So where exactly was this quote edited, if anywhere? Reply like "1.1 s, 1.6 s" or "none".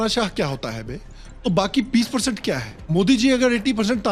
none